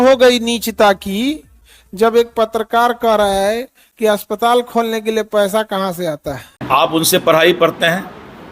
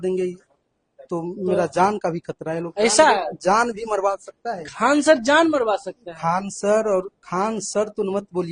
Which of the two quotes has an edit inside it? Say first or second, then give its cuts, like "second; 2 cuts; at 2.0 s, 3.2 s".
first; 1 cut; at 6.5 s